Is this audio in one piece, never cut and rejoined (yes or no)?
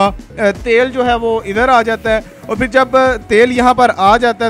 yes